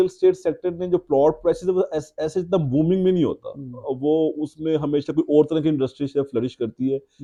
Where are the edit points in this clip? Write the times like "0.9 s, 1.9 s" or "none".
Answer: none